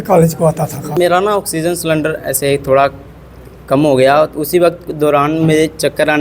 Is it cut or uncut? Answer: cut